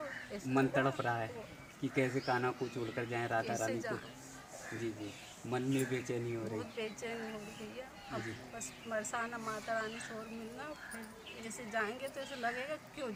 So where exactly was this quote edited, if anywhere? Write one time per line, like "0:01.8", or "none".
none